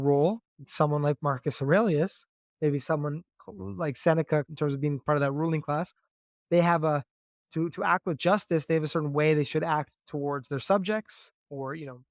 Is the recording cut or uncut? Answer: cut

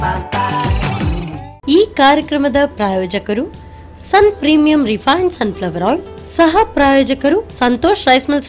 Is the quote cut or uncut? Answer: cut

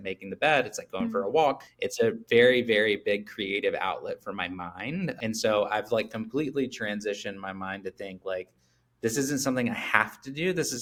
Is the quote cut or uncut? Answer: uncut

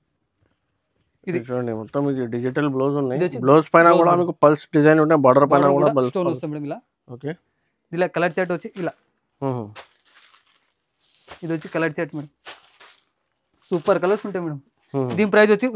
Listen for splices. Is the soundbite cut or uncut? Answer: uncut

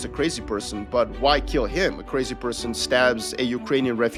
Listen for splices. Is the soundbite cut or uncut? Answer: uncut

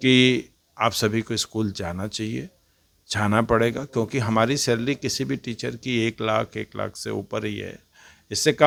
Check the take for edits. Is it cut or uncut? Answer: uncut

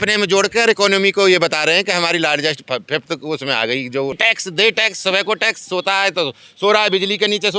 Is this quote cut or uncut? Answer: cut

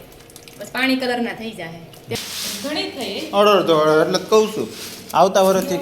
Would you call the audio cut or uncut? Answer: cut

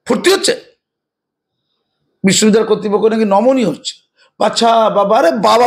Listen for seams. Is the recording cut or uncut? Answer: uncut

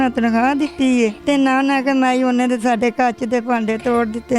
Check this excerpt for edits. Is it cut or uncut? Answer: cut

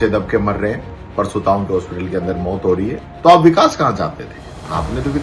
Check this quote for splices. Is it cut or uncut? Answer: cut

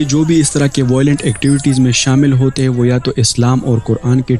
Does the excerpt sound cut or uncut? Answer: uncut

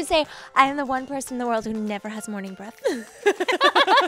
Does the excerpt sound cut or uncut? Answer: uncut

